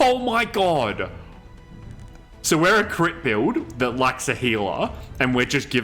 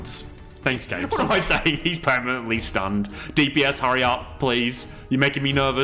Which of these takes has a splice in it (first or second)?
second